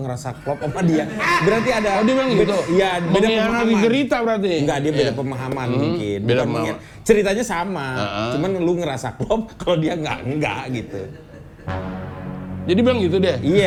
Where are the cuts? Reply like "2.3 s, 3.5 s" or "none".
none

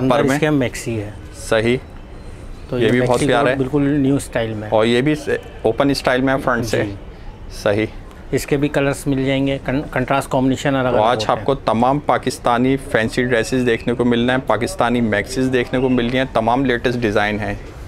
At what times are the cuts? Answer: none

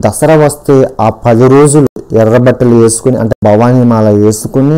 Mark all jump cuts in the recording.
none

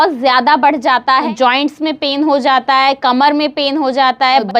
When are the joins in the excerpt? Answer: 1.3 s

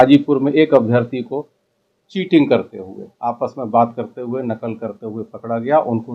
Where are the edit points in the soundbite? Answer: none

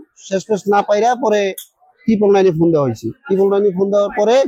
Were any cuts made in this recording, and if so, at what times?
none

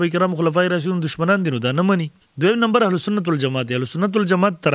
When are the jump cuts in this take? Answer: 2.2 s

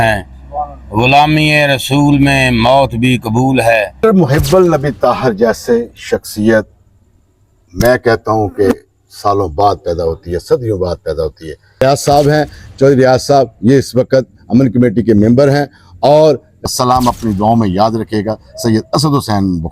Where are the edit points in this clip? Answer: 3.9 s, 11.8 s, 16.5 s

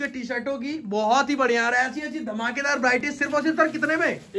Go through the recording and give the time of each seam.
none

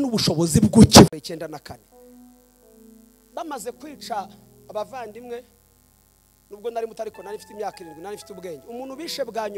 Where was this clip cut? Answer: 1.1 s

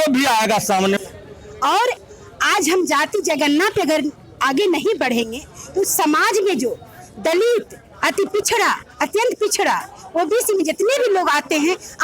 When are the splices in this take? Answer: 1.0 s

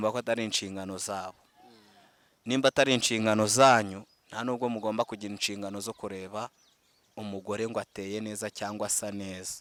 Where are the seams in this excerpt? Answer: none

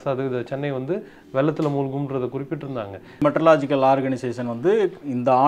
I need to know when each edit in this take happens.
3.2 s

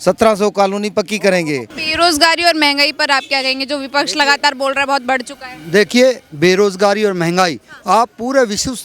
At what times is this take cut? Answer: 1.8 s

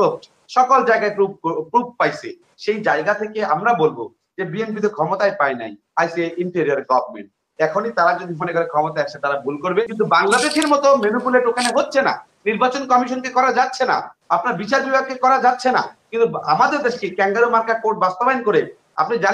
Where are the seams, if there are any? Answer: 9.8 s

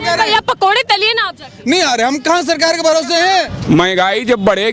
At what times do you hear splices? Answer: 3.6 s

